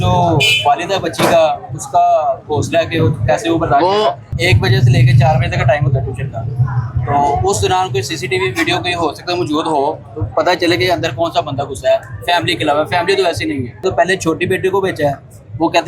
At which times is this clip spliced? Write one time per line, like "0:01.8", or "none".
0:04.3
0:13.8